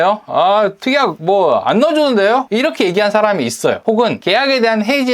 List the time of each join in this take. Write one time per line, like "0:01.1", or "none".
0:01.2
0:02.5
0:04.0